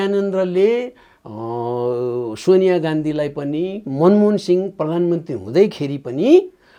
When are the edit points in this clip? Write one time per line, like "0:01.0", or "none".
none